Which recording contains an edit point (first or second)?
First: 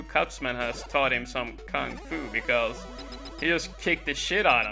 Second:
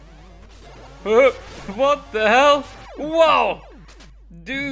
second